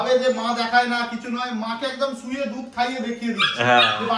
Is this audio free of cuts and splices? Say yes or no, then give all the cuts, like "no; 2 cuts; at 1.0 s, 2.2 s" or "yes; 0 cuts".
yes; 0 cuts